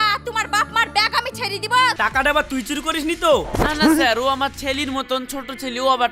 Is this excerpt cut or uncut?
cut